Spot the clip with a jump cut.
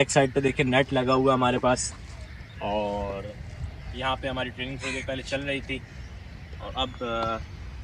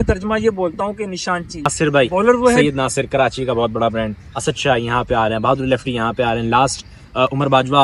second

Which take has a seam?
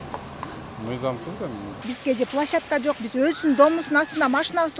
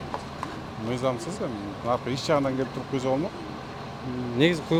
first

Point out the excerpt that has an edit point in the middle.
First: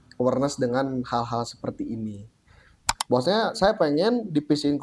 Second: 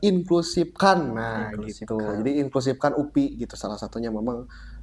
first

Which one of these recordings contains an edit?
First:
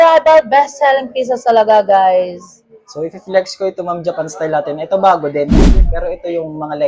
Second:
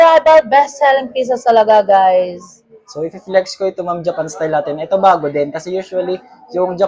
first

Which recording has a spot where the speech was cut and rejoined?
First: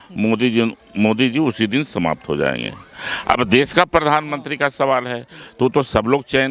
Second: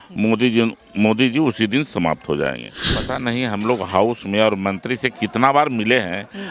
second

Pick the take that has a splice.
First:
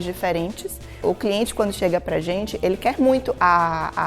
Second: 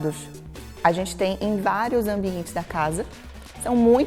first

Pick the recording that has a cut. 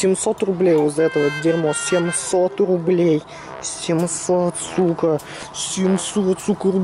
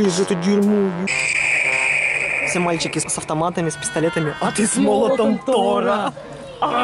second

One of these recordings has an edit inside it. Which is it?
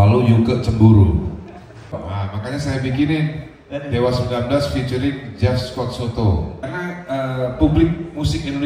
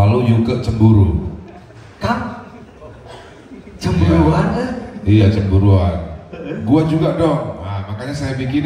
first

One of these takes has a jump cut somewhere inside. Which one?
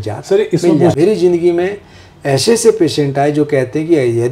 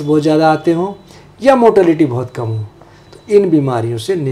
first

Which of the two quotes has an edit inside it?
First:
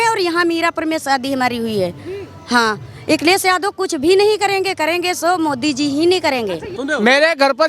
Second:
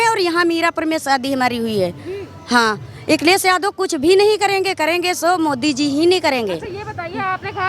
first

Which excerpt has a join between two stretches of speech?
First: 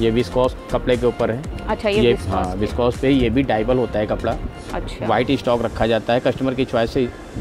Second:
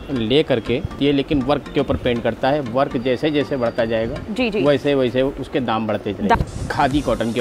second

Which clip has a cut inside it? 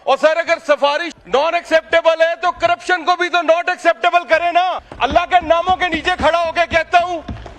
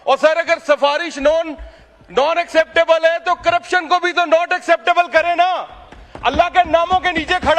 first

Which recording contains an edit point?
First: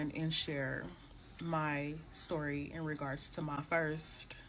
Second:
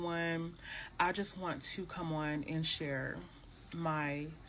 first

